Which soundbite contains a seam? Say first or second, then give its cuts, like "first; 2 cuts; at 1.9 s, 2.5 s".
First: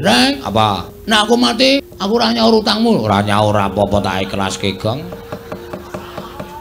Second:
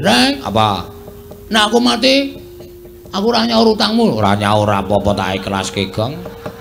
first; 2 cuts; at 0.9 s, 1.9 s